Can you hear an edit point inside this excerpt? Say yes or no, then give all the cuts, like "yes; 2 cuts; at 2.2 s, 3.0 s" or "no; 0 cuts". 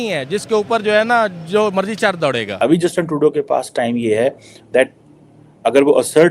yes; 1 cut; at 2.5 s